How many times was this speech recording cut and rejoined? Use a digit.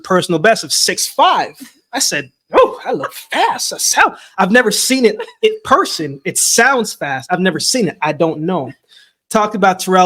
0